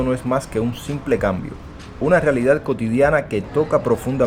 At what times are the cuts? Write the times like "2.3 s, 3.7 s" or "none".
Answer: none